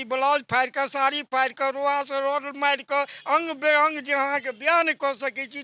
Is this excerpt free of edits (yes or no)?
yes